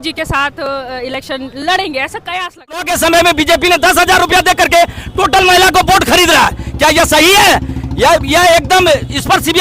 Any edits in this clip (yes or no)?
yes